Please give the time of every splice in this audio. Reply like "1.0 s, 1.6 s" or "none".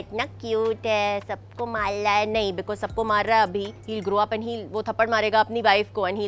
3.8 s